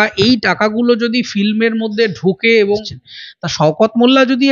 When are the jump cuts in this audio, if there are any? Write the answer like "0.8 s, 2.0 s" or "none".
3.0 s